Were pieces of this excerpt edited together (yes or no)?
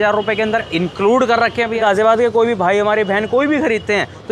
yes